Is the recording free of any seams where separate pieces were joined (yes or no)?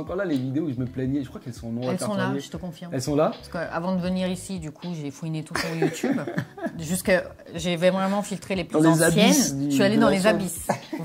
yes